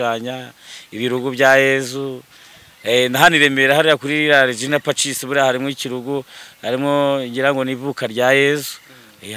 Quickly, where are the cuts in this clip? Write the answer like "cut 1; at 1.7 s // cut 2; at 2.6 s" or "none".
none